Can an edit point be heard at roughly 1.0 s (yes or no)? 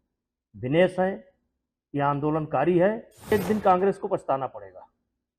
no